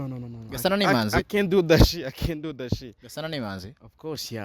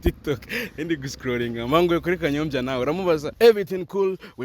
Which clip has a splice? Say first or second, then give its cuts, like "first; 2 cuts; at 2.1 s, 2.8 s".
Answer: second; 1 cut; at 3.3 s